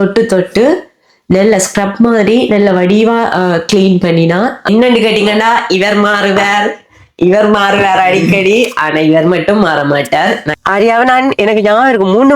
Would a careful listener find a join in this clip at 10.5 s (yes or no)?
yes